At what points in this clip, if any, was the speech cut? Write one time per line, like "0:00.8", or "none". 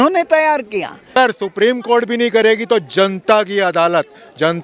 0:01.1